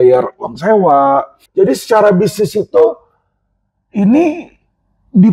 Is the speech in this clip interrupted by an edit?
yes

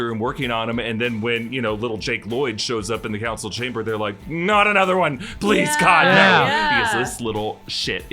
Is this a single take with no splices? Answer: no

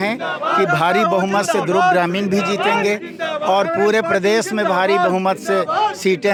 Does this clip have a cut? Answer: no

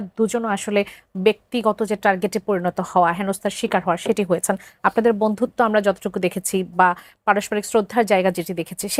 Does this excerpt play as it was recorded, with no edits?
yes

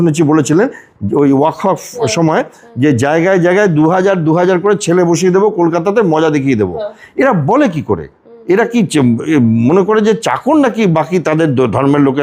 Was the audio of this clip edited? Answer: no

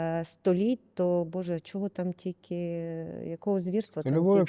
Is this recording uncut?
yes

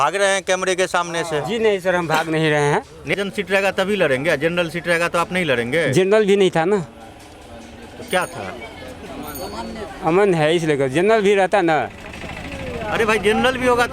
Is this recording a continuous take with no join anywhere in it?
no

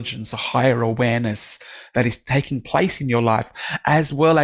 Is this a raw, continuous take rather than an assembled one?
yes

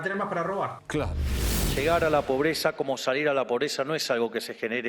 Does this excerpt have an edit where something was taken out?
yes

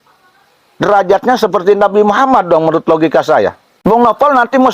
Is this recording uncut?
no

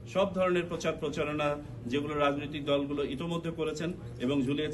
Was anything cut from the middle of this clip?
no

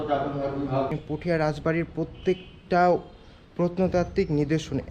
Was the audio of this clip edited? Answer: yes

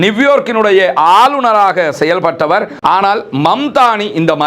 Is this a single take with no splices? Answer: no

